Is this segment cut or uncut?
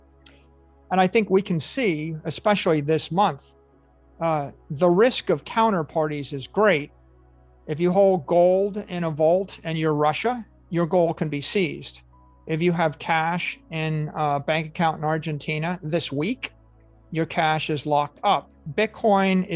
cut